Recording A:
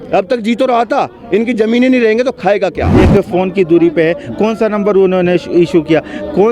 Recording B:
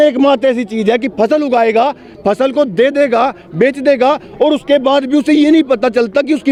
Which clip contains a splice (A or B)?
A